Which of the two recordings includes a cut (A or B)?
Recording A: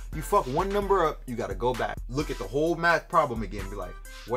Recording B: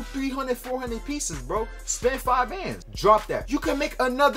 B